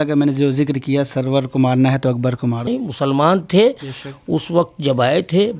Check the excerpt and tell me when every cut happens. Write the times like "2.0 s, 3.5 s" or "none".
2.7 s